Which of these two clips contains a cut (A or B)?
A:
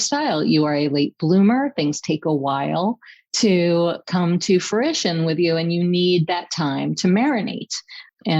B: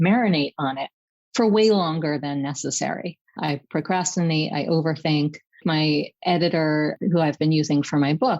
B